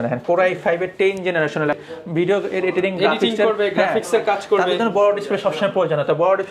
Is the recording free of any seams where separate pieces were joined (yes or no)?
no